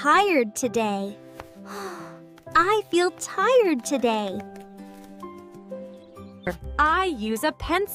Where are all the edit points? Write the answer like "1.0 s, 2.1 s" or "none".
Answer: none